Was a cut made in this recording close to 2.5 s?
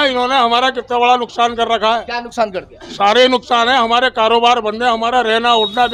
no; 0 cuts

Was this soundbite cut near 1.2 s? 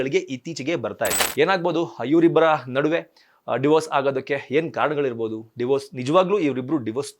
yes; 1 cut; at 1.2 s

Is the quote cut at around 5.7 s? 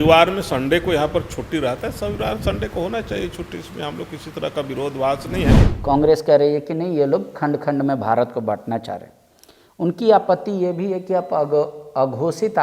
yes; 1 cut; at 5.7 s

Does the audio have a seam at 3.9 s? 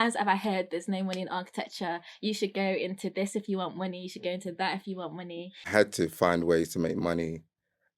no; 1 cut; at 5.7 s

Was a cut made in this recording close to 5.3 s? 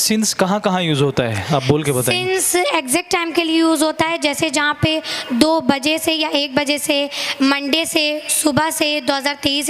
no; 0 cuts

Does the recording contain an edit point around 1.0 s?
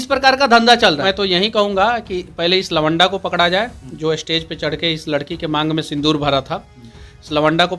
no; 0 cuts

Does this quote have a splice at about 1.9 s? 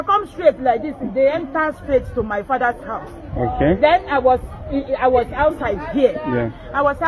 no; 0 cuts

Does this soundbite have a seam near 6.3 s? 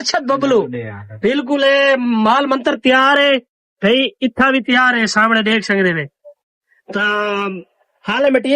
no; 0 cuts

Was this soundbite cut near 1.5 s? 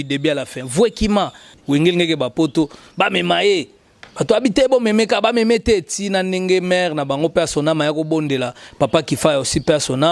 yes; 1 cut; at 1.5 s

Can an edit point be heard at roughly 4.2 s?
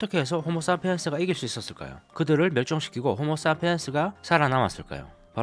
yes; 1 cut; at 4.2 s

